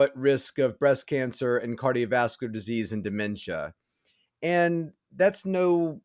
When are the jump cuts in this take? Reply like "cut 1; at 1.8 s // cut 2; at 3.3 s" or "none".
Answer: none

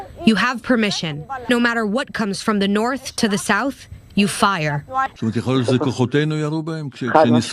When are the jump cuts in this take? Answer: cut 1; at 1.5 s // cut 2; at 5.1 s

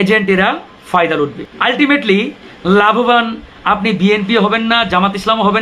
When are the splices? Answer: cut 1; at 1.4 s

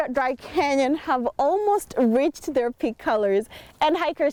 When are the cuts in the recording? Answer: none

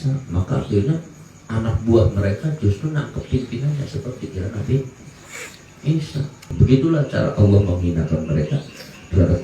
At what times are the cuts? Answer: cut 1; at 6.4 s

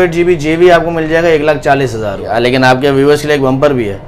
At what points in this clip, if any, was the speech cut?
cut 1; at 2.2 s

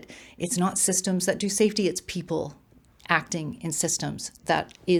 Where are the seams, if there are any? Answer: none

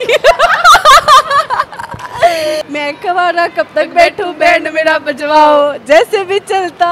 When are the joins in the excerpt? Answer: cut 1; at 2.6 s

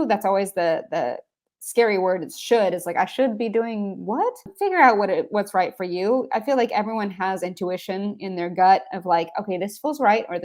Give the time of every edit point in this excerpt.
cut 1; at 4.5 s

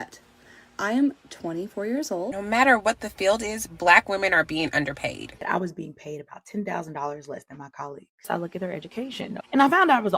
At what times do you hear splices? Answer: cut 1; at 2.3 s // cut 2; at 5.4 s // cut 3; at 8.3 s

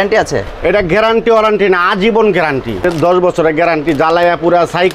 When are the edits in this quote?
cut 1; at 2.9 s

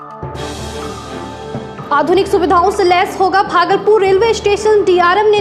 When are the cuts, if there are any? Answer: none

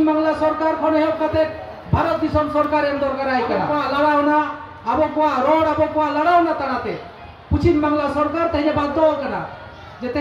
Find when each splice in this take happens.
cut 1; at 3.7 s

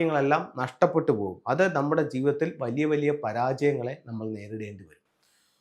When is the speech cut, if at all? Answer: none

